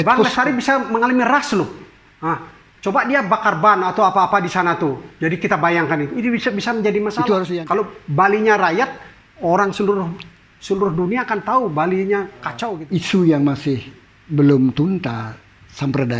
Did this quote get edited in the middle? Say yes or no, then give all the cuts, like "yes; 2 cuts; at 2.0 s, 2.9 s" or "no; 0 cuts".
yes; 2 cuts; at 7.5 s, 12.7 s